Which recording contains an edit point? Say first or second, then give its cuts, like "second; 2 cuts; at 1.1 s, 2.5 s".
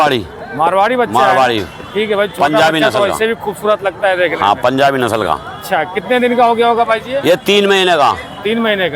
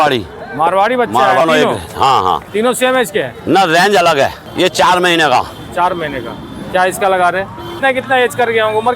second; 3 cuts; at 1.4 s, 4.4 s, 7.7 s